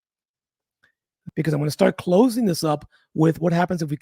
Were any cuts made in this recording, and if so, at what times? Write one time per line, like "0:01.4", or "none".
0:01.1